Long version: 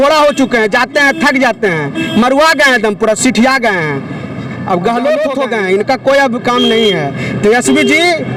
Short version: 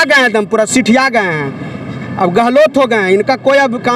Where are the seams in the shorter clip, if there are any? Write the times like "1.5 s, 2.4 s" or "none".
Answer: 2.6 s